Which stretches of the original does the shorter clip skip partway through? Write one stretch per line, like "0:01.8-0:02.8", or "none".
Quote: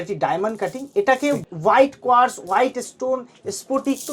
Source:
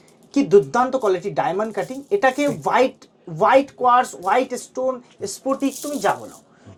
0:02.6-0:03.2